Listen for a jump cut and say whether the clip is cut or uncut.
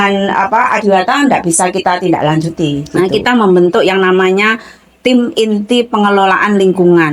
cut